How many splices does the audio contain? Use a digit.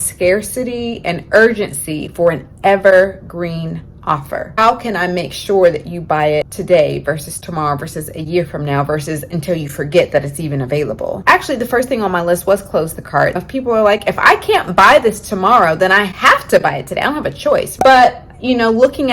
5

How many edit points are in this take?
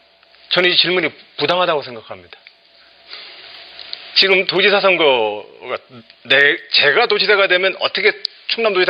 0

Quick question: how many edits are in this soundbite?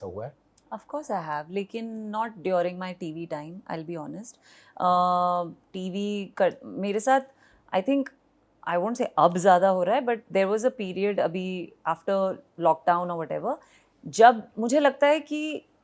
0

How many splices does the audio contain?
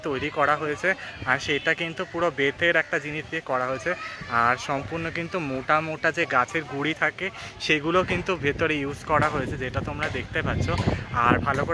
0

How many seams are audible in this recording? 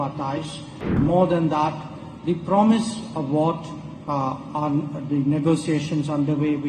1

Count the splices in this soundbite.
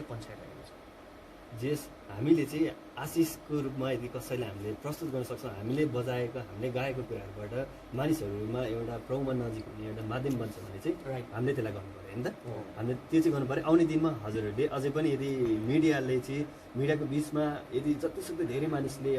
0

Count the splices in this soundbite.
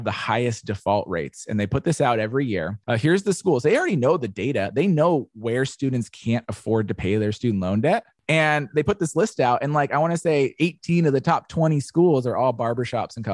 0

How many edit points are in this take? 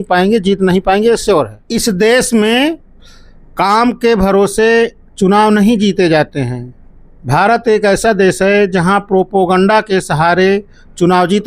1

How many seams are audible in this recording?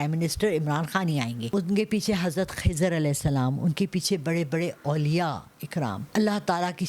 2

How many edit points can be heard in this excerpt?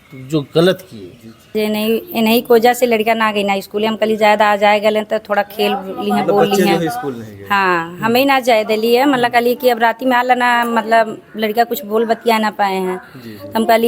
1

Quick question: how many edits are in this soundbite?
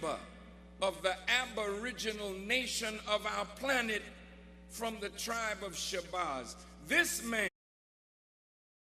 0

